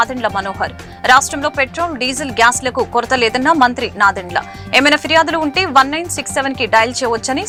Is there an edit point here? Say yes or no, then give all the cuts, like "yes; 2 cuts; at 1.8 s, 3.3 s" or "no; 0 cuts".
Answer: no; 0 cuts